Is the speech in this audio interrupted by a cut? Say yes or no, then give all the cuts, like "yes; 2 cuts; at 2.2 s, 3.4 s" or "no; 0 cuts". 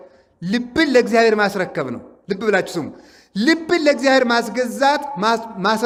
no; 0 cuts